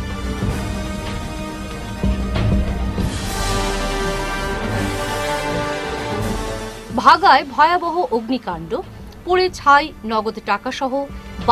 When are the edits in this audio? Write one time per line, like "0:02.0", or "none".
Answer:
none

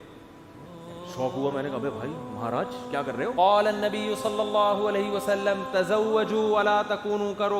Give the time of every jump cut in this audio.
0:03.3

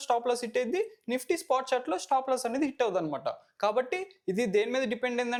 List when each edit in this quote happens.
none

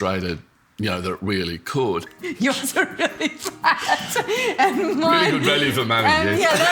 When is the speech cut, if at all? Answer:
0:02.2

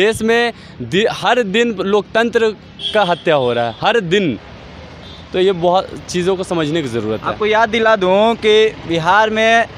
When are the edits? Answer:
none

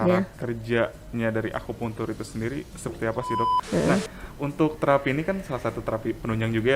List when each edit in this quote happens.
0:03.6

